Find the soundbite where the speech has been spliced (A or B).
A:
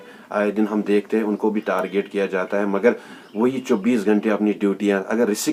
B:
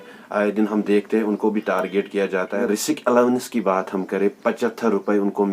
B